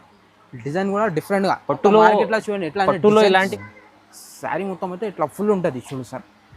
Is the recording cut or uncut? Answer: cut